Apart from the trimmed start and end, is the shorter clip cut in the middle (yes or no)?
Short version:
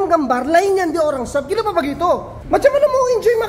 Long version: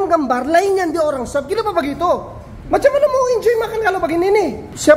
yes